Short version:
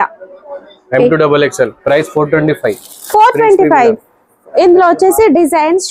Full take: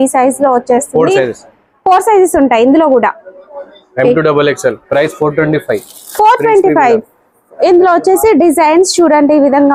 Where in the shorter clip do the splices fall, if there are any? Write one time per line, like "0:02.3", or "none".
none